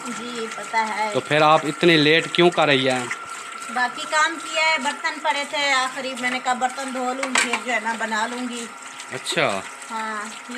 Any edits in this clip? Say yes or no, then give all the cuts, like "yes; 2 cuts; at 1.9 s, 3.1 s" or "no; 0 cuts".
no; 0 cuts